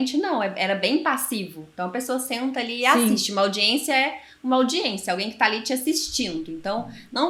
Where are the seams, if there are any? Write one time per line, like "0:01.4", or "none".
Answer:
none